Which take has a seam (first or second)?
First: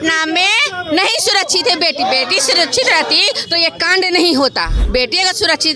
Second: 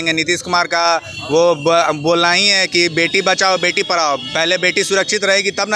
first